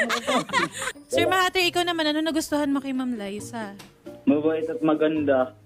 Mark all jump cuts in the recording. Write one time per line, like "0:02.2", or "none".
0:00.9